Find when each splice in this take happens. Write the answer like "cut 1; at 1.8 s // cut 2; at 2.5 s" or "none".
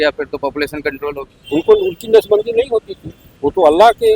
cut 1; at 1.3 s